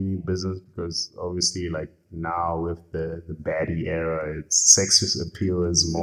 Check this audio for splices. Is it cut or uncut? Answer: uncut